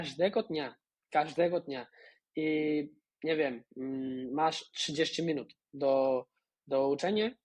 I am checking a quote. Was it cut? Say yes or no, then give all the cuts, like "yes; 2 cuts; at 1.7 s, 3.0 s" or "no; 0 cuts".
no; 0 cuts